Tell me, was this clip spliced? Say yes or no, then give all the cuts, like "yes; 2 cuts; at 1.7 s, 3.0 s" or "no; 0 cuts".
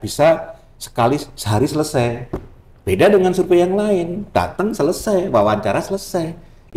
no; 0 cuts